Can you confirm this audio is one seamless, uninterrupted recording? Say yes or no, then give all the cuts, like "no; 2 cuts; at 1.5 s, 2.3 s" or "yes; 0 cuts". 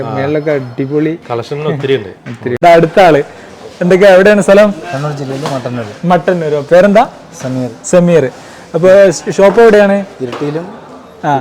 no; 1 cut; at 2.5 s